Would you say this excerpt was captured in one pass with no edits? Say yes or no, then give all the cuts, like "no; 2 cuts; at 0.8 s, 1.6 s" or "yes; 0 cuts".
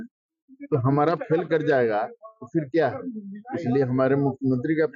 yes; 0 cuts